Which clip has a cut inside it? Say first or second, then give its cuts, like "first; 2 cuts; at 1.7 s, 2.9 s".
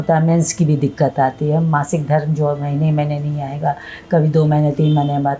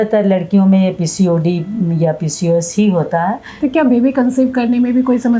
second; 1 cut; at 3.5 s